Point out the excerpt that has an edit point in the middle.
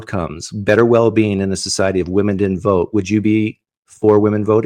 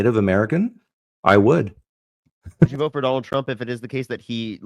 second; 1 cut; at 2.7 s

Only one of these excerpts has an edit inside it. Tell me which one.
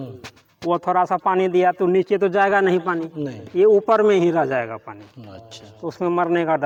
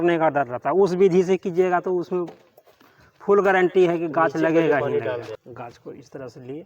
second; 1 cut; at 5.3 s

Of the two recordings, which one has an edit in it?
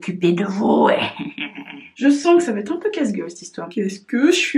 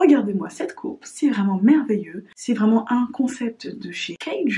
first; 2 cuts; at 1.8 s, 3.6 s

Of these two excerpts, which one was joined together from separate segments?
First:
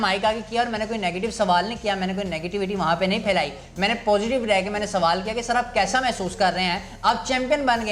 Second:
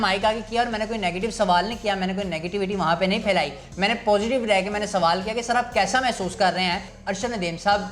second; 1 cut; at 6.9 s

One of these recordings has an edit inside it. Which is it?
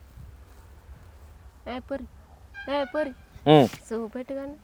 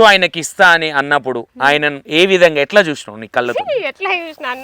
second; 2 cuts; at 2.0 s, 2.7 s

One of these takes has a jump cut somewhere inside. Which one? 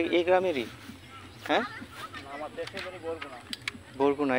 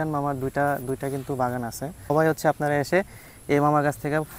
second; 1 cut; at 2.1 s

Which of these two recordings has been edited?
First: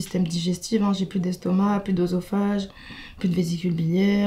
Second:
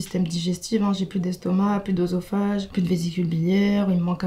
second; 1 cut; at 2.7 s

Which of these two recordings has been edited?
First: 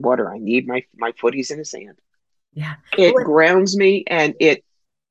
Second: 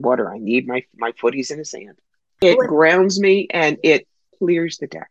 second; 2 cuts; at 2.4 s, 4.2 s

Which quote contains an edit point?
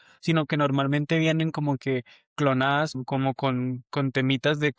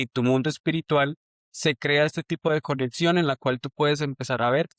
first; 1 cut; at 3.0 s

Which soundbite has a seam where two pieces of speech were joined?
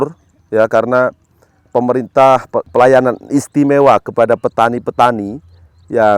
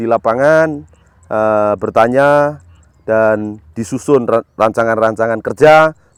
first; 1 cut; at 2.7 s

